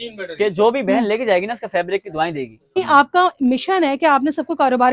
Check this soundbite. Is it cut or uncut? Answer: cut